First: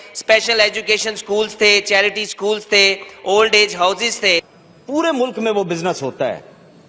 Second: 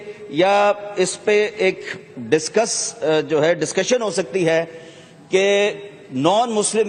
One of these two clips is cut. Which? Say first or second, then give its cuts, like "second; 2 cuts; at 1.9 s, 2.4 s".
first; 1 cut; at 4.6 s